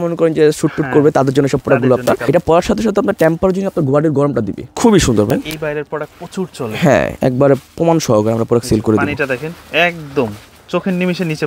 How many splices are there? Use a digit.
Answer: 3